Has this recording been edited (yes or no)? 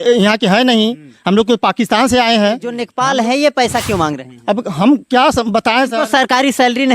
yes